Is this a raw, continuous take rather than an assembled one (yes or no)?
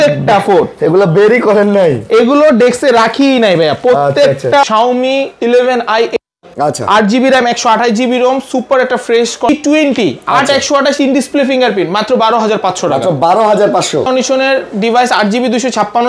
no